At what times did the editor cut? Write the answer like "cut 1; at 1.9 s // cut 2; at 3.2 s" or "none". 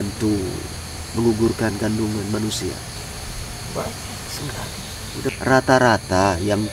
cut 1; at 2.9 s // cut 2; at 5.3 s